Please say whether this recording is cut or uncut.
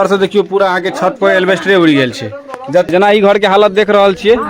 cut